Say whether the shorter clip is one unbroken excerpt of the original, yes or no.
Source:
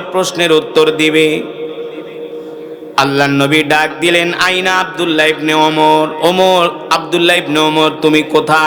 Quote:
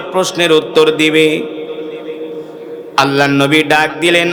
yes